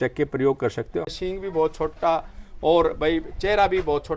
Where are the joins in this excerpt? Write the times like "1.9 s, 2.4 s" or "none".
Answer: 1.0 s

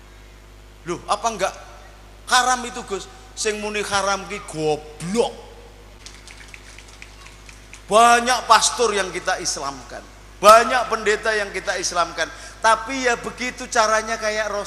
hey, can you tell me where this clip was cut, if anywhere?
6.0 s

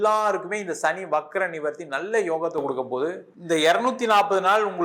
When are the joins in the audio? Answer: 3.3 s

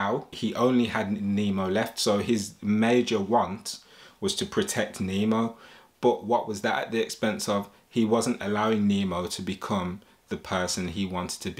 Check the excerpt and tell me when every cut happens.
none

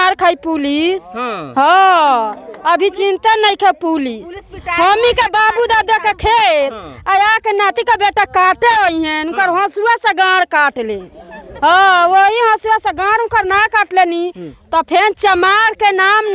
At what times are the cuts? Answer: none

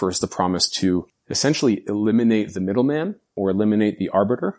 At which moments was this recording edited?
1.2 s

